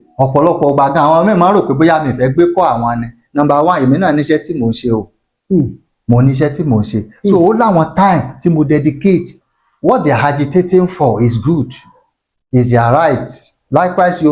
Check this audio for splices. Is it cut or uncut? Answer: cut